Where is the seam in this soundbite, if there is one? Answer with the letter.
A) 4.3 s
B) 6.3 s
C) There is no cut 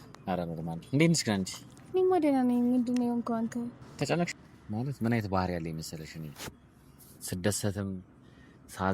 A